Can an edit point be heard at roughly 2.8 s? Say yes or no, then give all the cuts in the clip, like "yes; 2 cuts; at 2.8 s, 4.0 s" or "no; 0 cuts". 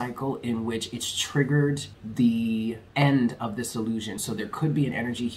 yes; 3 cuts; at 2.0 s, 2.8 s, 4.2 s